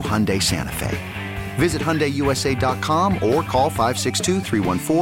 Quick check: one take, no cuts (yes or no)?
yes